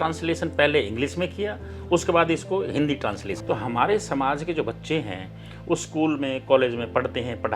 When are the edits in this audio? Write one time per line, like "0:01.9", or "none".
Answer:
0:03.3